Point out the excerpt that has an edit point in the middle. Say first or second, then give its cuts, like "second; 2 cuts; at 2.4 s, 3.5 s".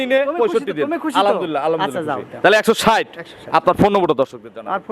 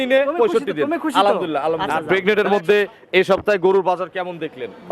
second; 1 cut; at 1.9 s